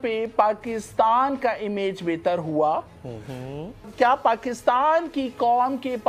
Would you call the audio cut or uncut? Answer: uncut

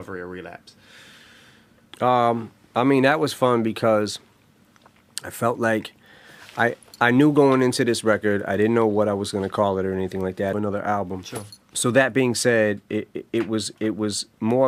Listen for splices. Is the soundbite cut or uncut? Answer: uncut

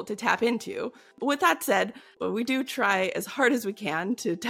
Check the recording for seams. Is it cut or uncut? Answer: cut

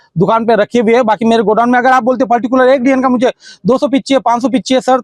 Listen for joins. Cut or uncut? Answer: uncut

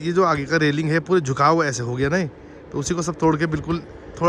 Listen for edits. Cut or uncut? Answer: uncut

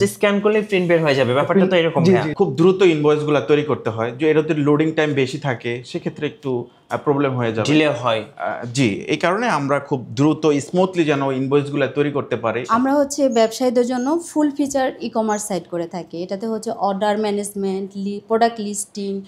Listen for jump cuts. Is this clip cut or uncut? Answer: cut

